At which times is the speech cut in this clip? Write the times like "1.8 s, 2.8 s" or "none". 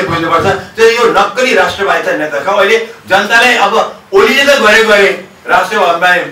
none